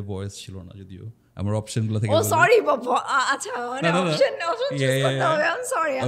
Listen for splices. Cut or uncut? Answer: uncut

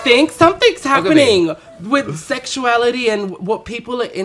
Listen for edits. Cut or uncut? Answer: uncut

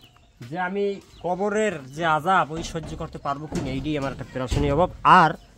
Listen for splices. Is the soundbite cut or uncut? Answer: uncut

